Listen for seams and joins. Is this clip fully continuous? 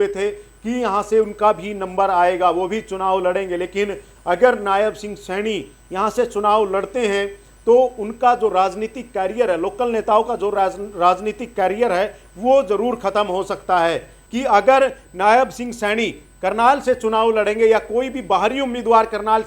no; 1 cut; at 14.2 s

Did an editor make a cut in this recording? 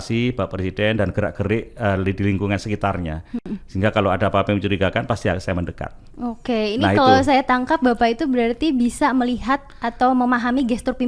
no; 0 cuts

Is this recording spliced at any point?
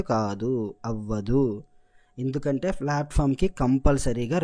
no; 0 cuts

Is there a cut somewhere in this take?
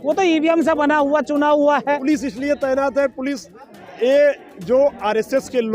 yes; 1 cut; at 2.0 s

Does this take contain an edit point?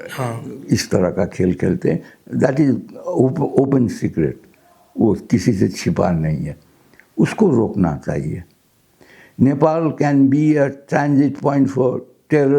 no; 0 cuts

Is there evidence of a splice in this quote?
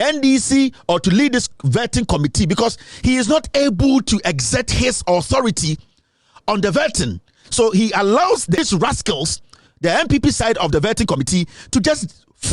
yes; 1 cut; at 8.6 s

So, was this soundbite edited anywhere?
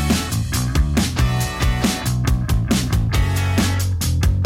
yes; 1 cut; at 2.1 s

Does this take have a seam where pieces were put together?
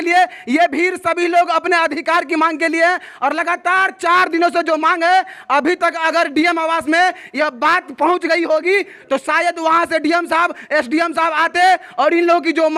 no; 0 cuts

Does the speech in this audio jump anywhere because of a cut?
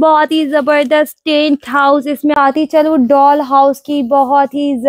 yes; 1 cut; at 2.3 s

